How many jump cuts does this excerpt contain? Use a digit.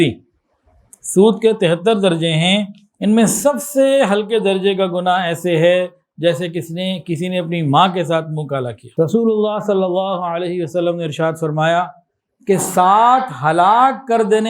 1